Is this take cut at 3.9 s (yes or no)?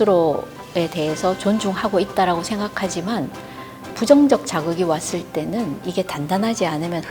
yes